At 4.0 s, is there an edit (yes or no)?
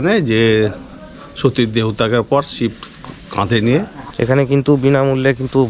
yes